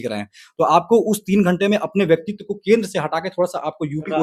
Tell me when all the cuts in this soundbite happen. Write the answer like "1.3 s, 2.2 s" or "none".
none